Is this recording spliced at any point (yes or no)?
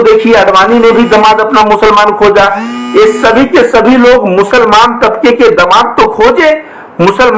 no